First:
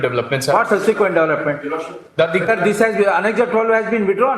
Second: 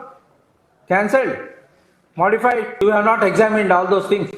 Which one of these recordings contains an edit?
second; 1 cut; at 2.8 s

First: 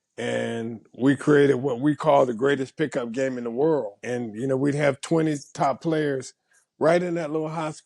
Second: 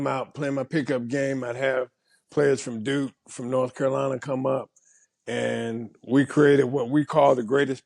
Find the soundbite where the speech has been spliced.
first; 1 cut; at 4.0 s

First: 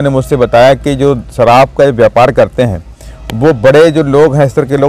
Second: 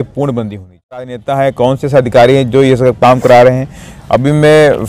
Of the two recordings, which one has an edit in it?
second; 1 cut; at 1.2 s

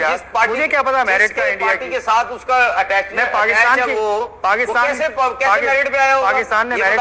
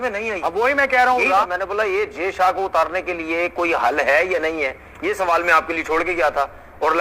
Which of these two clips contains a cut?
second; 1 cut; at 1.4 s

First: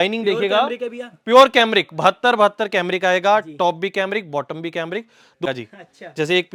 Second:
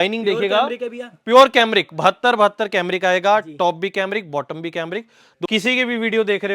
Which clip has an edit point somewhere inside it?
second; 1 cut; at 5.5 s

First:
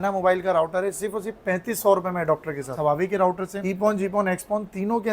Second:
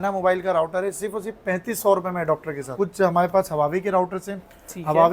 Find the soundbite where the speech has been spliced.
first; 2 cuts; at 2.7 s, 3.6 s

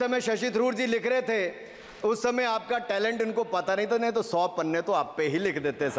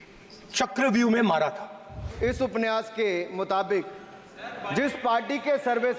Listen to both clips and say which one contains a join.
second; 1 cut; at 2.2 s

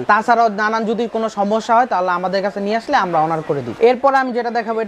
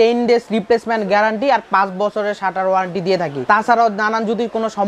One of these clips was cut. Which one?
first; 1 cut; at 3.8 s

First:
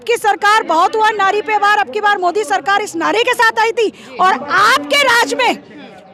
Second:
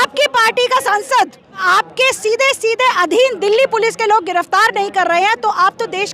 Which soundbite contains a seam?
second; 1 cut; at 1.6 s

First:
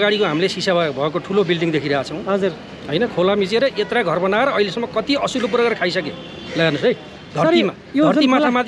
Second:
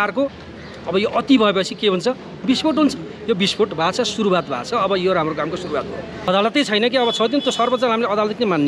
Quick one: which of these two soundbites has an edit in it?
second; 1 cut; at 6.3 s

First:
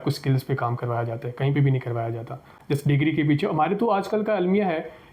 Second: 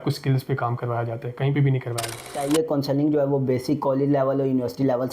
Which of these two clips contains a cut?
second; 1 cut; at 2.4 s

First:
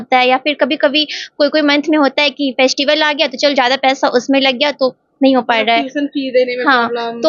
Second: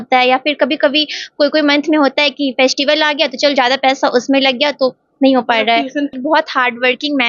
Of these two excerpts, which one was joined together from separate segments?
second; 1 cut; at 6.1 s

